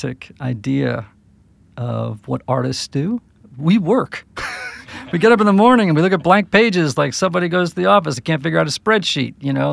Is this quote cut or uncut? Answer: uncut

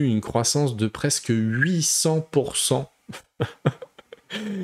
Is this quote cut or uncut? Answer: uncut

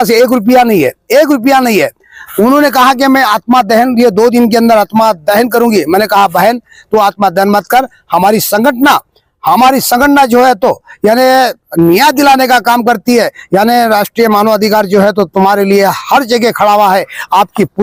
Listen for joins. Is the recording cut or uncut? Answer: uncut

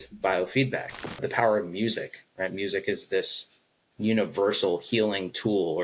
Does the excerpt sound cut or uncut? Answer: cut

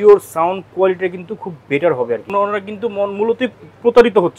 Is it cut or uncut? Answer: cut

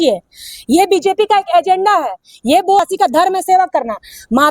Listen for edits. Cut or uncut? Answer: cut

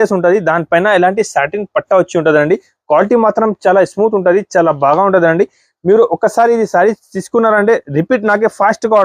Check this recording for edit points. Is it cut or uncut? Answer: uncut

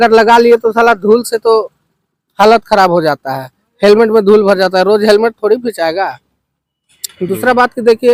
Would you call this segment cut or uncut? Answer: uncut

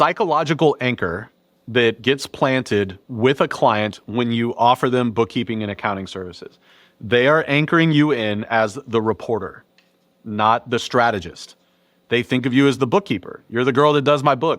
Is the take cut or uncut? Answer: cut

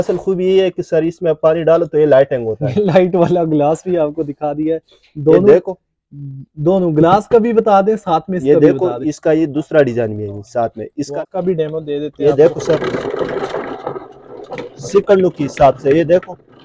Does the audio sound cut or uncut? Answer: cut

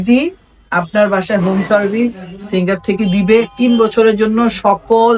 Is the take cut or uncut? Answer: uncut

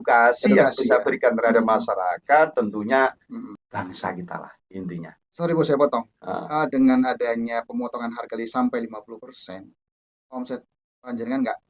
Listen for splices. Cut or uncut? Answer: uncut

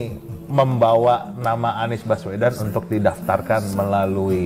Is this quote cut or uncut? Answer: uncut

